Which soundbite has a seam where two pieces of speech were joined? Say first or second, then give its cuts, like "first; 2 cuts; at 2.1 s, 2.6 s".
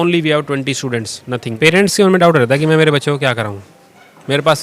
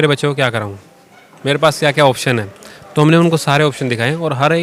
first; 1 cut; at 1.5 s